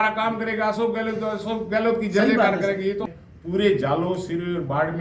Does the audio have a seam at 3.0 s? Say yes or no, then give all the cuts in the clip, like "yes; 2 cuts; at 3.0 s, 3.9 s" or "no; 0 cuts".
yes; 1 cut; at 3.0 s